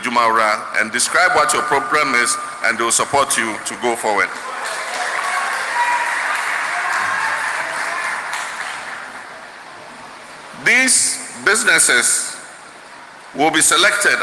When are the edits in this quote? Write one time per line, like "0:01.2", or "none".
none